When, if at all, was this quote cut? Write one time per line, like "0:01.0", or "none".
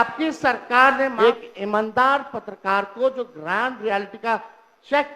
0:01.1